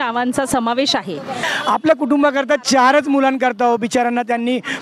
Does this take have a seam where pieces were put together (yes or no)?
yes